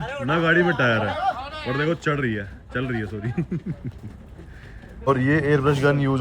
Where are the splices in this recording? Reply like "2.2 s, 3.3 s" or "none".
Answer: 5.1 s